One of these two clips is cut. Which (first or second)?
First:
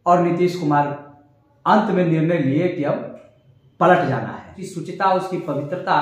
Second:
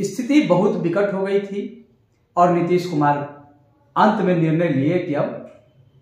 first